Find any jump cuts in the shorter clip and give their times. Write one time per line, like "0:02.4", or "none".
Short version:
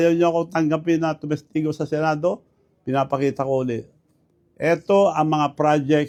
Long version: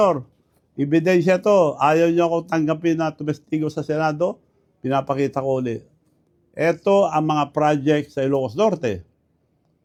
none